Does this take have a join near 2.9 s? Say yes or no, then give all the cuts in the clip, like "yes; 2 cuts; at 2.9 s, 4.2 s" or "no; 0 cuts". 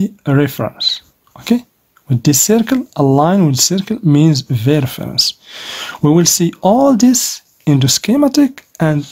no; 0 cuts